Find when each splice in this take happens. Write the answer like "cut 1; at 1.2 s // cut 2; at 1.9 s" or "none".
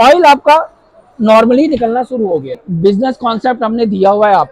cut 1; at 2.7 s